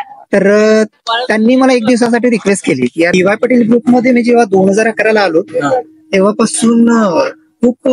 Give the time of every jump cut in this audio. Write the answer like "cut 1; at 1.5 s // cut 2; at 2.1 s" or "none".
cut 1; at 3.1 s